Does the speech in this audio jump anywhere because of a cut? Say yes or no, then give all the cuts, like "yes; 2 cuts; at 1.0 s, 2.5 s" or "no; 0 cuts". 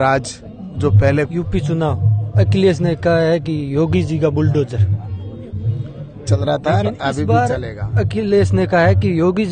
yes; 2 cuts; at 1.3 s, 6.3 s